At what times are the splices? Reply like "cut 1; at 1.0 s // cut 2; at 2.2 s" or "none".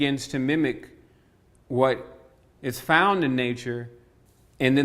cut 1; at 1.5 s